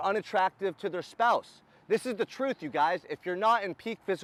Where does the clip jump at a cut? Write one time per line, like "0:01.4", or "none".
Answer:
none